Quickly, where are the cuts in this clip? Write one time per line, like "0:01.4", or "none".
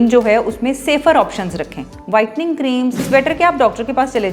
0:03.1